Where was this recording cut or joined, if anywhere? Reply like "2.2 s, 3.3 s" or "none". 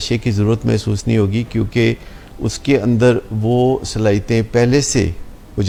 none